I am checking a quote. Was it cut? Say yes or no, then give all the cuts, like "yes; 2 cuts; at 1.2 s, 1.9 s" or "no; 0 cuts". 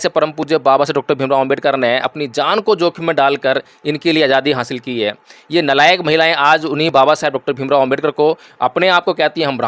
no; 0 cuts